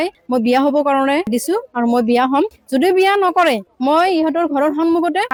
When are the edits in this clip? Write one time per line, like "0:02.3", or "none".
none